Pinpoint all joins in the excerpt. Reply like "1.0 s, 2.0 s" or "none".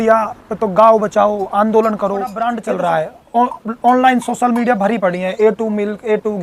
2.4 s

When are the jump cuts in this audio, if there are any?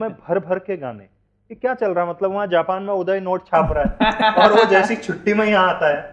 none

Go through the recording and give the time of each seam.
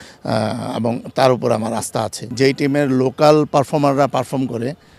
2.3 s

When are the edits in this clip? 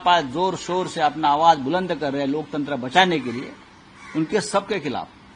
none

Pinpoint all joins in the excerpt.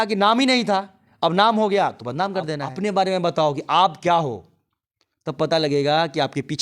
2.6 s

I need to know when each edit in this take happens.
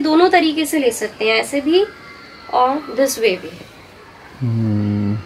none

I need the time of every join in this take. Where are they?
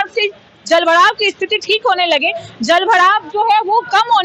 none

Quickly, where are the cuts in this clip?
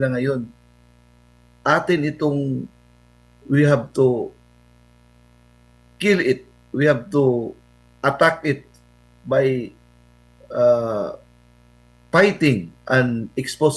none

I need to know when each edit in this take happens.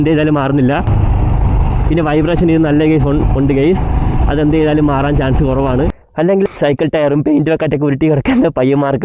1.0 s, 6.3 s

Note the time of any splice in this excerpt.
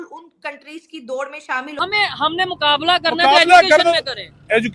1.7 s

